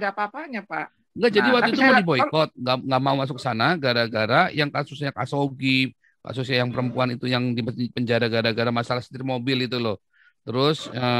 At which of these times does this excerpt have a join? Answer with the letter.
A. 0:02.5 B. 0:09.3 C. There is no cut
C